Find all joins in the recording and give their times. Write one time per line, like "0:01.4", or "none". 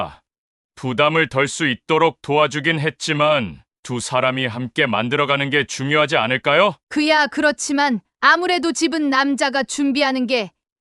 0:06.8